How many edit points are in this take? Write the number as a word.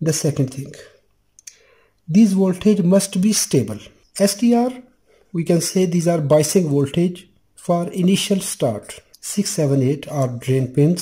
one